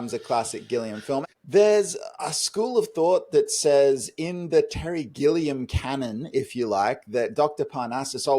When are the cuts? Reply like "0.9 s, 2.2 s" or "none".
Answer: 1.2 s